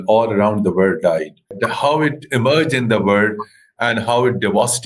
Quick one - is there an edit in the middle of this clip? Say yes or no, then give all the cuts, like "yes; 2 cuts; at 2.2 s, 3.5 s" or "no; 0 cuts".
yes; 1 cut; at 1.6 s